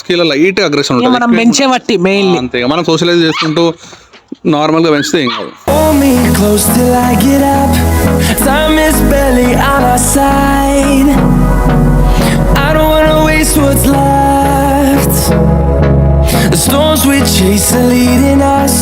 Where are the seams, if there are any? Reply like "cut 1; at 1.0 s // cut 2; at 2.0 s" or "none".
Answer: cut 1; at 5.6 s